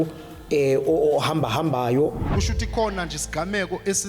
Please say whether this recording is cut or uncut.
cut